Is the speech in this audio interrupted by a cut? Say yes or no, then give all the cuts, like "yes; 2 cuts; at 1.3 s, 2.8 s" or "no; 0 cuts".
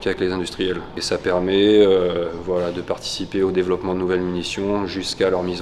no; 0 cuts